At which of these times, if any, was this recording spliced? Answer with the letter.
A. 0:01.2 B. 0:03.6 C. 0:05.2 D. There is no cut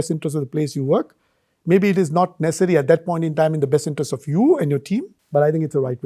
C